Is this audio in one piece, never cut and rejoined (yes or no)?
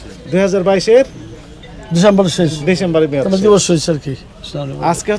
yes